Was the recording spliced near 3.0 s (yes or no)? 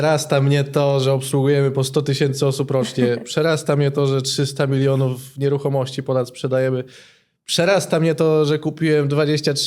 no